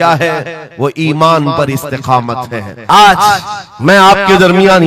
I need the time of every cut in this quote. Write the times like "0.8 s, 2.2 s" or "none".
2.7 s